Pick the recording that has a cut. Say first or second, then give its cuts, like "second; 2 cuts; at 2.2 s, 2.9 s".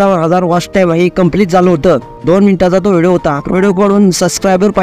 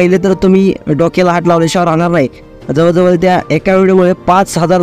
first; 1 cut; at 2.2 s